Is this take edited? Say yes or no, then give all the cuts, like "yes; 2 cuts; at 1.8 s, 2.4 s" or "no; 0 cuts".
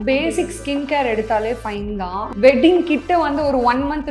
yes; 1 cut; at 2.3 s